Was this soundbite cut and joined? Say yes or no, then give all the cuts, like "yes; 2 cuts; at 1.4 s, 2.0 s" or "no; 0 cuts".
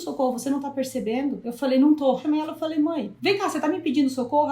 yes; 3 cuts; at 1.5 s, 2.2 s, 3.1 s